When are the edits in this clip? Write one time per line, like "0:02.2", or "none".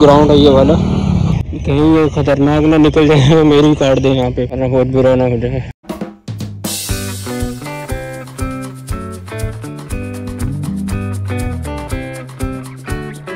none